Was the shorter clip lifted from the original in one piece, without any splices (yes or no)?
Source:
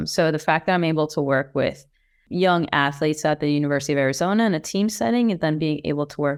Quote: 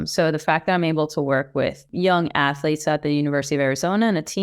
no